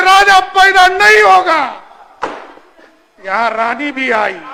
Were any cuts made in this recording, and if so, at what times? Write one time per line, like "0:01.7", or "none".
none